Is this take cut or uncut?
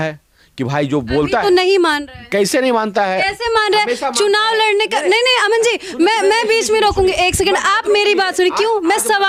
uncut